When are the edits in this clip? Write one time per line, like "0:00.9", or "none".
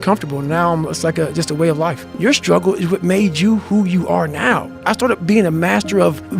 0:02.2
0:04.8